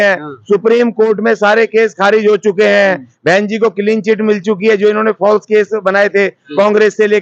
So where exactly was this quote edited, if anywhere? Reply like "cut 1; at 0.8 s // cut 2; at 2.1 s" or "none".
none